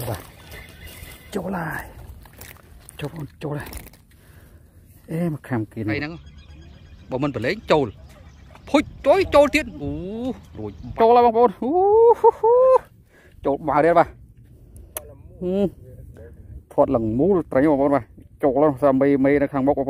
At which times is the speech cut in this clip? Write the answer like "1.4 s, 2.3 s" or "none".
6.0 s, 10.9 s